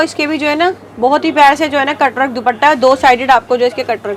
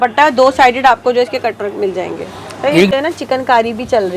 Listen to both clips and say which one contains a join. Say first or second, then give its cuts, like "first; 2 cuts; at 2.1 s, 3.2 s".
second; 1 cut; at 2.9 s